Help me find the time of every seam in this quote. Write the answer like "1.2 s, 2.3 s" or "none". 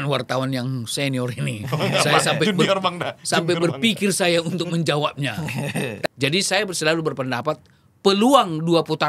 6.1 s